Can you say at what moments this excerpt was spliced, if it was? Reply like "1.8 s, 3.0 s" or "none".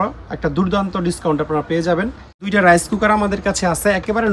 2.3 s